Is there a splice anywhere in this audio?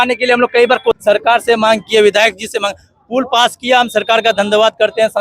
yes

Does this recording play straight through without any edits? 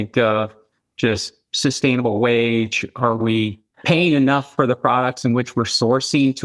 yes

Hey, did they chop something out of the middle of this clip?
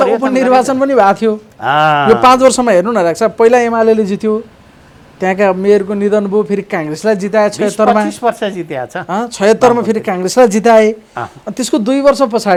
no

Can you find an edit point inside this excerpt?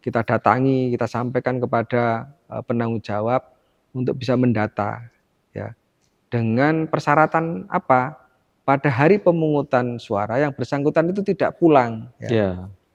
no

